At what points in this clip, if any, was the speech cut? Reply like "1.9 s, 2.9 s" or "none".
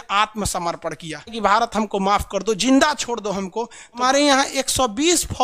1.3 s, 4.0 s

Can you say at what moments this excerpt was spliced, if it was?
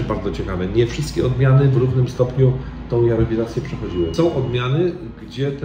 4.1 s

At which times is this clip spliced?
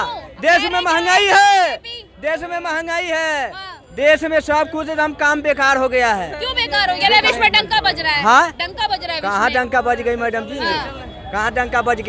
none

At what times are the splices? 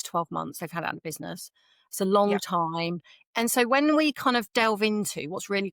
3.2 s

